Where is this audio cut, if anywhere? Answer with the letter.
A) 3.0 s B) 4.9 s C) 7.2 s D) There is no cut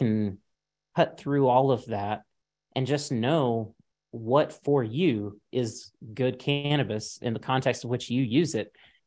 D